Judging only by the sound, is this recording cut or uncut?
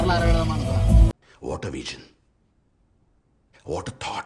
cut